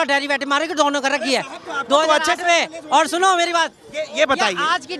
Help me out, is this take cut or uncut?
uncut